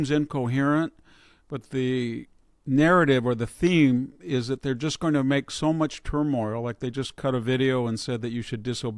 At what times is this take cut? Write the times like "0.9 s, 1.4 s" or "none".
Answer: none